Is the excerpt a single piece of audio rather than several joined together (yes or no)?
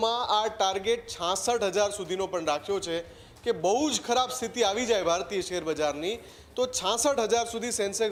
yes